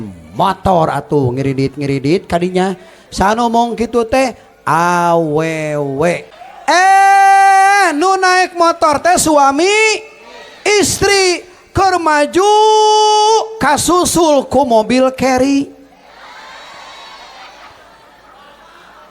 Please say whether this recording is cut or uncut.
cut